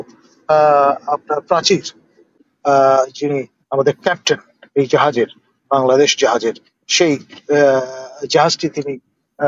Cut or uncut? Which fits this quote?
cut